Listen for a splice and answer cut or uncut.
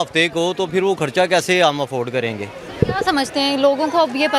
uncut